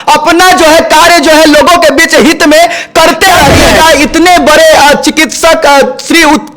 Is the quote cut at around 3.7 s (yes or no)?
yes